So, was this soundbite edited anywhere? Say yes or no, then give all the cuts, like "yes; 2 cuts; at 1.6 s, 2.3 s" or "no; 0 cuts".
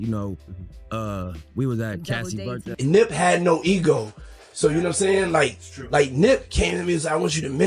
yes; 1 cut; at 2.6 s